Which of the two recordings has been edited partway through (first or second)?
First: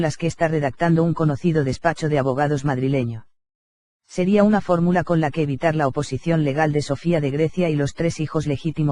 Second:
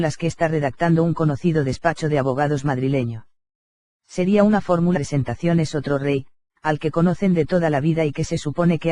first